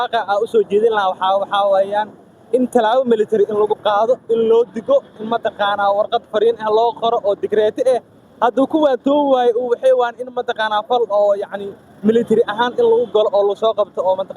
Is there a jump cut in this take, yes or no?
no